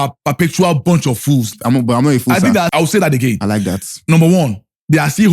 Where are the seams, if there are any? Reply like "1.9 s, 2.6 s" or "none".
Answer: 1.5 s, 2.7 s